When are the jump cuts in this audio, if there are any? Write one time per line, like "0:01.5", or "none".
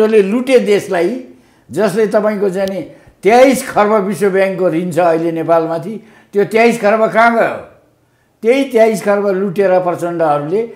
none